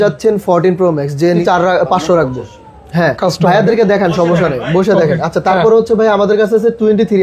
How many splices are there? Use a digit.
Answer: 1